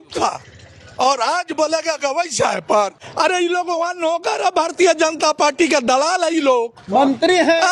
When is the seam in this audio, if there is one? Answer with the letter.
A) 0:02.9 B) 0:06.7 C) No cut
A